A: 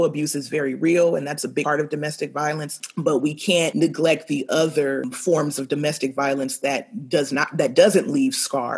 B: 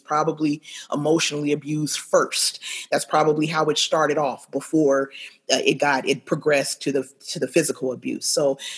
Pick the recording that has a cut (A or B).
A